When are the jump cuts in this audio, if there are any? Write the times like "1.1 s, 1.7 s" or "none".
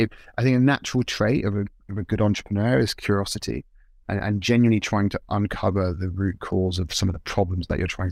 none